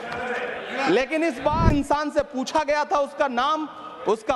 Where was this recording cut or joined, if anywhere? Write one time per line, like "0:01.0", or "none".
0:01.7